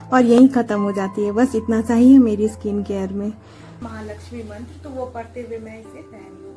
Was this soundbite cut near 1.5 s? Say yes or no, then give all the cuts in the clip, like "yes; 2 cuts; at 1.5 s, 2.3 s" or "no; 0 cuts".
no; 1 cut; at 3.8 s